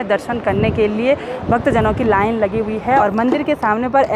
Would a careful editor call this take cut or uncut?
cut